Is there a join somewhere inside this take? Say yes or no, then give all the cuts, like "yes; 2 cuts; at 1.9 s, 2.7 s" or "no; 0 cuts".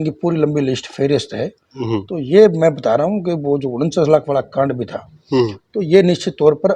no; 0 cuts